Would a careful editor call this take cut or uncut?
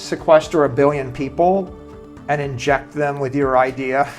uncut